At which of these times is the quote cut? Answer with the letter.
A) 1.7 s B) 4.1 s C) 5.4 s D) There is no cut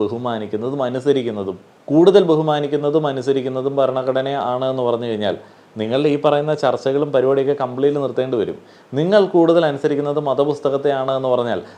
D